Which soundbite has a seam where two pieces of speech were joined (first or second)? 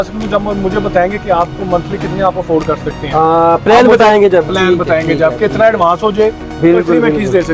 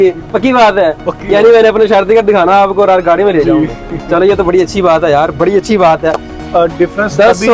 second